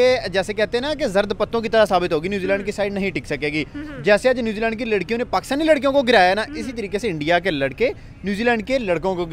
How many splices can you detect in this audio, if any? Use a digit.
0